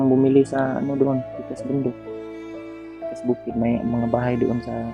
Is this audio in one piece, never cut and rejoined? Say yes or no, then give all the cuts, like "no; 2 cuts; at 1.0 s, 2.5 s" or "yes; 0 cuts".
yes; 0 cuts